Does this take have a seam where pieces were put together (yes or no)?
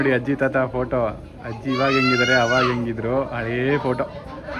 no